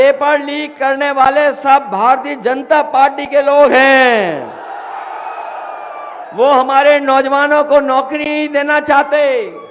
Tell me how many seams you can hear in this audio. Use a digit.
0